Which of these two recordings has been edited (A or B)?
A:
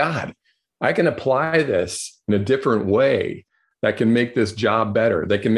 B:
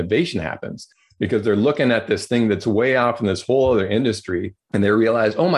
B